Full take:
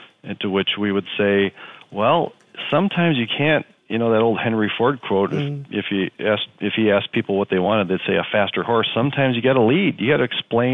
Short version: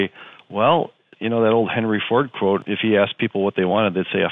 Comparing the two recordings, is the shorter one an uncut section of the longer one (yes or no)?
no